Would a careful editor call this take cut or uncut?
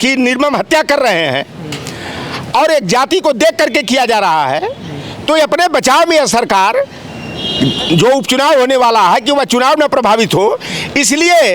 uncut